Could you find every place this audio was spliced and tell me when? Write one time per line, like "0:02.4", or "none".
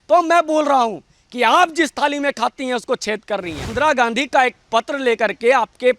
0:03.6